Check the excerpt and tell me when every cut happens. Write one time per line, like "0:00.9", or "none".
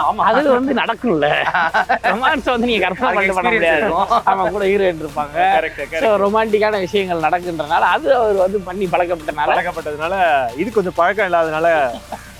none

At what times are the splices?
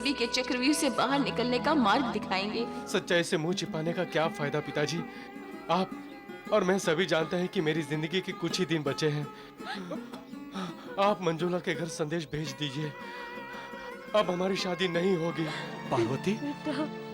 0:02.8
0:09.8
0:15.7

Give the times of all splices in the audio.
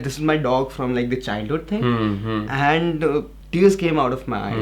0:03.4

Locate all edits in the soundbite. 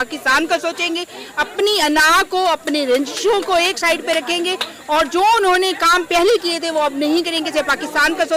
none

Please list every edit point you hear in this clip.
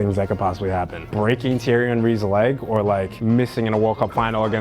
0:01.0
0:03.1

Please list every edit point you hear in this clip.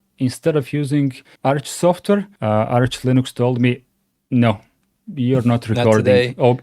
0:01.3
0:02.3

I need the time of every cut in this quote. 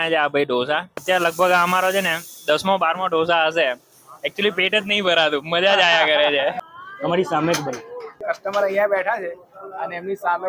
0:00.9
0:06.6
0:08.2

